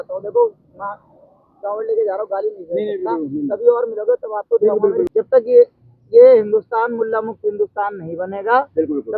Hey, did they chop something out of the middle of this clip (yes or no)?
yes